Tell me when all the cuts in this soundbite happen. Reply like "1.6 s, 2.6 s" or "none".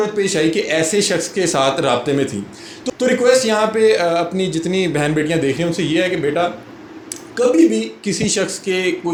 none